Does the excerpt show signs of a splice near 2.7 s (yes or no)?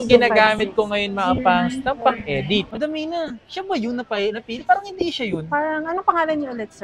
yes